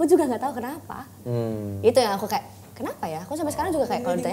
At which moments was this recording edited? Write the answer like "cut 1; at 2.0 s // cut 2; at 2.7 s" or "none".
none